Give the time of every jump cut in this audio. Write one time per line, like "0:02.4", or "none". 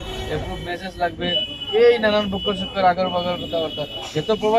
none